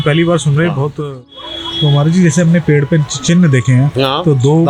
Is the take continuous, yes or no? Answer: no